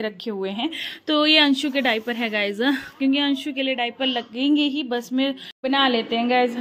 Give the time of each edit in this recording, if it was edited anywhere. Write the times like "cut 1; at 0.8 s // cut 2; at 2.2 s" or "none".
cut 1; at 5.5 s